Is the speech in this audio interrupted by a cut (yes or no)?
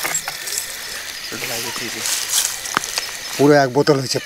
no